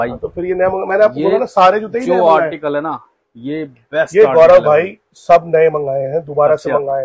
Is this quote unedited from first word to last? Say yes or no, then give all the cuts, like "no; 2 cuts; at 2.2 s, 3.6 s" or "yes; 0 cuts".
yes; 0 cuts